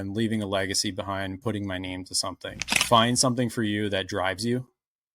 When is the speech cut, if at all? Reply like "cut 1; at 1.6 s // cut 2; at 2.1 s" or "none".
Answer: cut 1; at 2.7 s